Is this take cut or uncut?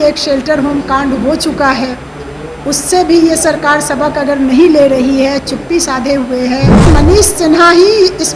cut